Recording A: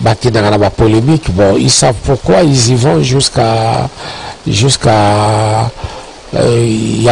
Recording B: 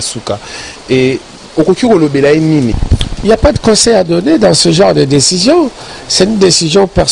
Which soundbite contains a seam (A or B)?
B